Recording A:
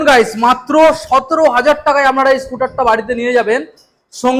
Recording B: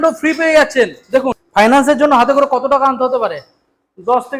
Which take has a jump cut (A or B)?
B